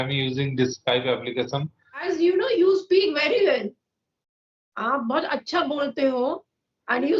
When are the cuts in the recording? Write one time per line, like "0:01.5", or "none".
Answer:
0:02.1